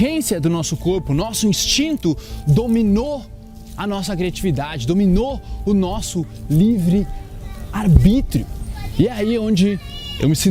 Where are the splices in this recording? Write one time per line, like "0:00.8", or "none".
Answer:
none